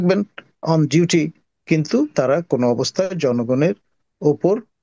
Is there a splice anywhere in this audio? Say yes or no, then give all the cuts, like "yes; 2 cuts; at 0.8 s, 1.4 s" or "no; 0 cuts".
no; 0 cuts